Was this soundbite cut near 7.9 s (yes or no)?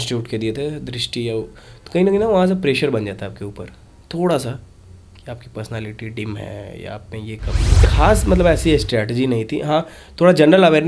yes